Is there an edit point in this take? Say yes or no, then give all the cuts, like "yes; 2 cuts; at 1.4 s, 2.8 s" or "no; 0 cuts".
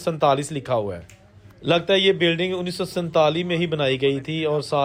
no; 0 cuts